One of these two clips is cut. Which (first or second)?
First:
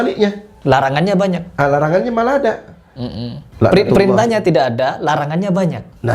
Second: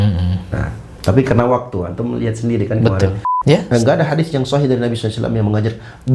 second